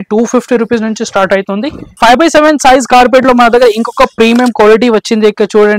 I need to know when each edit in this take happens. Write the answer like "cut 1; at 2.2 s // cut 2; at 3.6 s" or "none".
cut 1; at 1.9 s